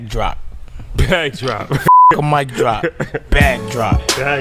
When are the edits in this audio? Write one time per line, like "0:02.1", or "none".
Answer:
none